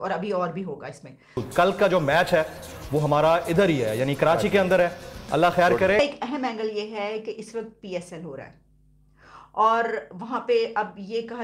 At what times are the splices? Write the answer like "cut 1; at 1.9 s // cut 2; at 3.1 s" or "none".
cut 1; at 1.4 s // cut 2; at 6.0 s